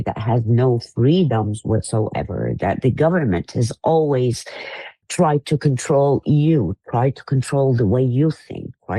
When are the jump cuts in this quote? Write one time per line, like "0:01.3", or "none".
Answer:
0:04.9